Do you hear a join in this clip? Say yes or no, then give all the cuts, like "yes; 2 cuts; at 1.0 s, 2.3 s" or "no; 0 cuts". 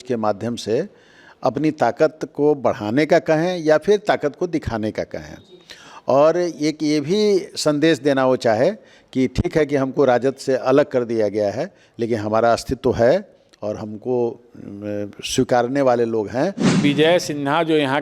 yes; 1 cut; at 16.8 s